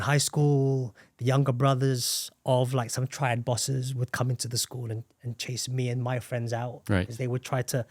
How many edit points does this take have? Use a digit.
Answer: 0